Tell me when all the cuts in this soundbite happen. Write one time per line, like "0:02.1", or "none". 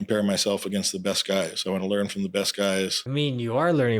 0:03.0